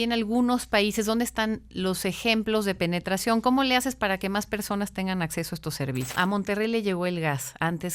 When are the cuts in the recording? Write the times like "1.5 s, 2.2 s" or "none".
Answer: 6.1 s